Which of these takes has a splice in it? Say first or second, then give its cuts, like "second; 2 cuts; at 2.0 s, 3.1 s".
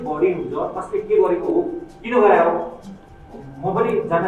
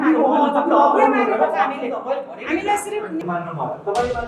second; 1 cut; at 3.2 s